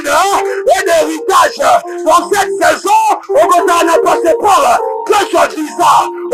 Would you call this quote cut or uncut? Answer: uncut